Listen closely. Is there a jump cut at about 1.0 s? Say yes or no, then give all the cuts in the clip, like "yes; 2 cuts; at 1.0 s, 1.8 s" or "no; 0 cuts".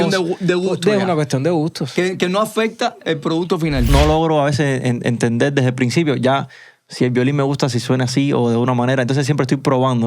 no; 1 cut; at 3.9 s